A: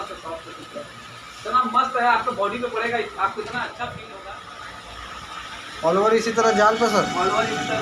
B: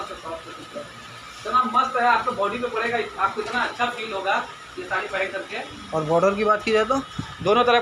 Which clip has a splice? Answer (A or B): A